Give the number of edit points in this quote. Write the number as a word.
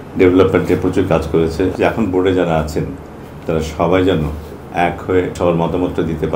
two